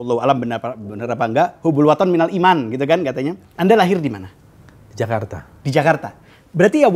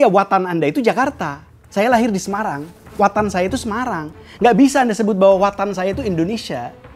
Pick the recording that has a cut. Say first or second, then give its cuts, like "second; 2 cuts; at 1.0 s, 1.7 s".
first; 1 cut; at 3.4 s